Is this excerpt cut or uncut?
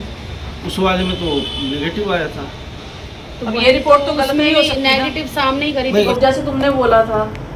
cut